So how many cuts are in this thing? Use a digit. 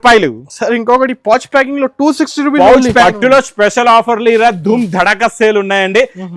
1